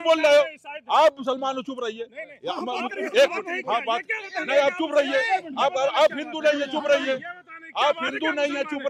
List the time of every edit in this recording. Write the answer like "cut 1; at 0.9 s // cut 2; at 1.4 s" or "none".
none